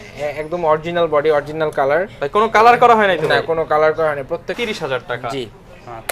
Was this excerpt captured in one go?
no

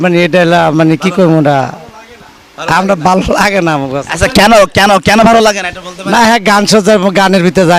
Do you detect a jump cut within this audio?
no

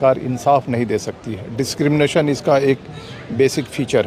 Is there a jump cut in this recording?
no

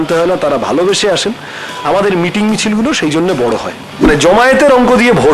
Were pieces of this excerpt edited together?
yes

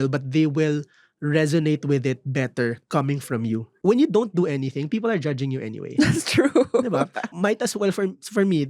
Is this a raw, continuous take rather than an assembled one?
no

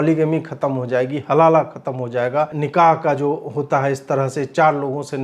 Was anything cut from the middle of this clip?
yes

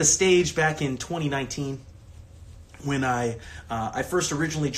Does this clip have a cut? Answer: no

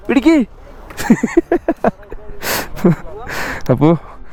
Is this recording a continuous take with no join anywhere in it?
yes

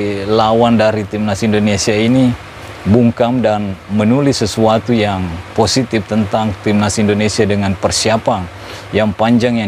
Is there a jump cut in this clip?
no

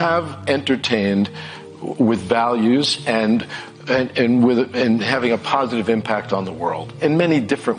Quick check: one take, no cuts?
no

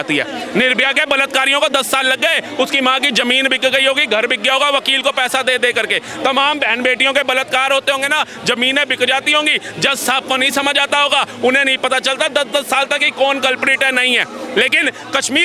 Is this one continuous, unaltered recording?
yes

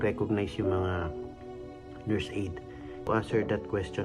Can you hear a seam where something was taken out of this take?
yes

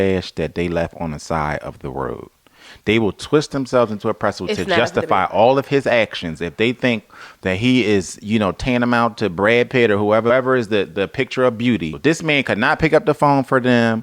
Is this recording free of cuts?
no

